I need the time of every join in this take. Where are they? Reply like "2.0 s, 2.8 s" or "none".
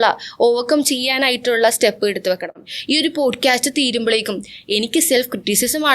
2.7 s